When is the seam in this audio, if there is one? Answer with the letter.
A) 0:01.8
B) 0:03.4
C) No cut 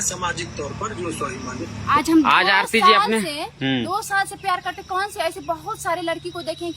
A